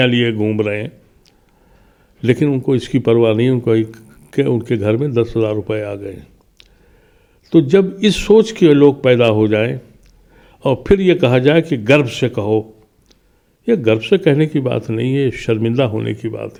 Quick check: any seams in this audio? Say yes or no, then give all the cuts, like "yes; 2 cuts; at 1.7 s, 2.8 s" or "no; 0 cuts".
no; 0 cuts